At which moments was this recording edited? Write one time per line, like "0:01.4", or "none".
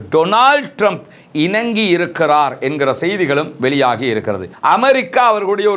0:04.6